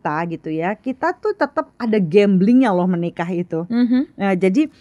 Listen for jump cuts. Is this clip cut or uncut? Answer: uncut